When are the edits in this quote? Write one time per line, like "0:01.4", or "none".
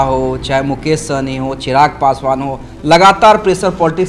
none